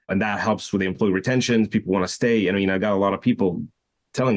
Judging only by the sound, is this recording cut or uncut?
uncut